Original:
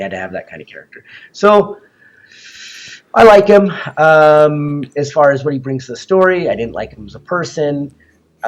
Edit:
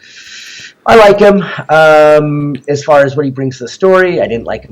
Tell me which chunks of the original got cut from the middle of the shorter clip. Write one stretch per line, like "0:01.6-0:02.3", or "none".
none